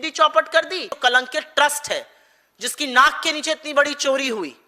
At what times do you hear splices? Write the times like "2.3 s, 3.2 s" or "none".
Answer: 0.9 s